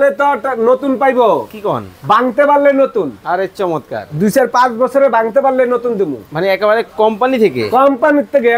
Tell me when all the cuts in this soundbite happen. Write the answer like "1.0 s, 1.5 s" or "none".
none